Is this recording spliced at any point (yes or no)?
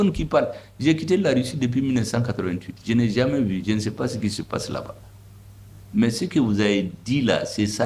no